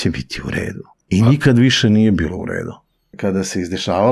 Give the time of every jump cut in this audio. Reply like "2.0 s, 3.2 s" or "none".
0.9 s, 3.1 s